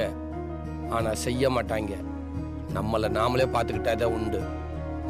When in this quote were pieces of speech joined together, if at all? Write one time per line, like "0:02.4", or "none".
none